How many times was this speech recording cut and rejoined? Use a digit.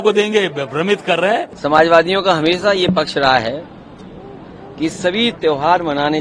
1